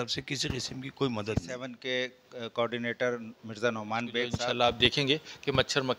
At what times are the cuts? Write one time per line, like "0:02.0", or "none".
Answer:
0:01.7
0:04.3